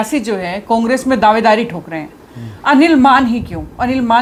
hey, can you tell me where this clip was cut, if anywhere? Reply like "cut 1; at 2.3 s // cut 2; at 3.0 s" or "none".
none